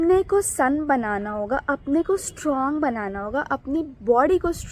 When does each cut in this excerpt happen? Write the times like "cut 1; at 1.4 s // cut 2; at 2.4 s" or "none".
none